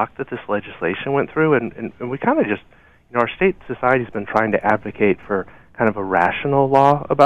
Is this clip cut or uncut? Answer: uncut